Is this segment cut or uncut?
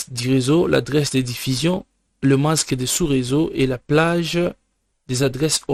uncut